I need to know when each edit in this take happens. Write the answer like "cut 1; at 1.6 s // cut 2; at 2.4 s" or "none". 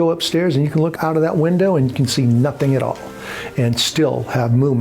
cut 1; at 0.9 s

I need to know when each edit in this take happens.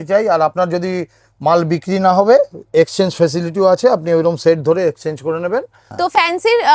cut 1; at 5.8 s

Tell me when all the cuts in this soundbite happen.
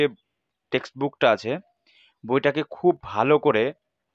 none

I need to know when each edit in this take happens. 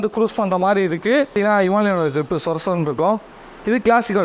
cut 1; at 1.3 s

